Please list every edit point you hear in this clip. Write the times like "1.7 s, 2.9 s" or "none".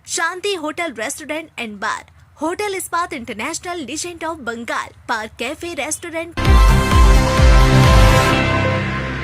6.3 s